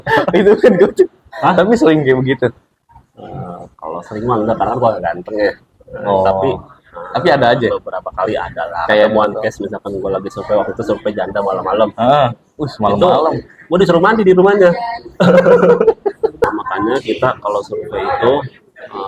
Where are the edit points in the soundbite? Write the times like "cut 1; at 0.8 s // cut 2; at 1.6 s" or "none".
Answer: cut 1; at 16.4 s